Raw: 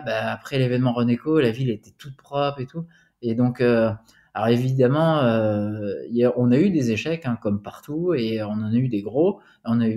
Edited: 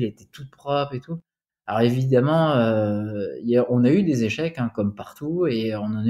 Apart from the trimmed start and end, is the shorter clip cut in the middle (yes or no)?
yes